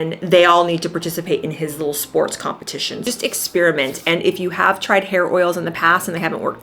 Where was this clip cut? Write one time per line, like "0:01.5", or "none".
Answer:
0:03.0